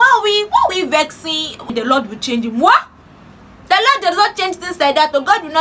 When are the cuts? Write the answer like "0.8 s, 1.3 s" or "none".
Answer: 1.7 s